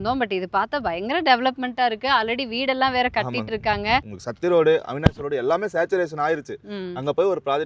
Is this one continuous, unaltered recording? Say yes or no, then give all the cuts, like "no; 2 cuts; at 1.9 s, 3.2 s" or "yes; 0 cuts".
no; 1 cut; at 4.2 s